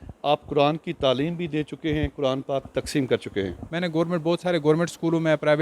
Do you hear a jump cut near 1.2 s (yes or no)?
no